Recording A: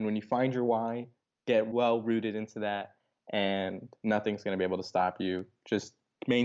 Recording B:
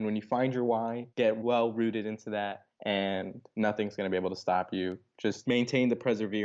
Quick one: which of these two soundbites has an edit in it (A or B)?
B